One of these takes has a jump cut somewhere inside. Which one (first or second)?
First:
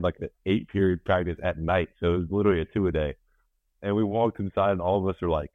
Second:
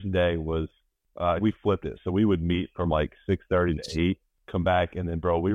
second